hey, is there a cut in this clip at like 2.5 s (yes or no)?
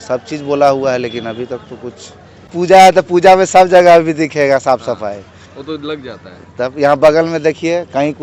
yes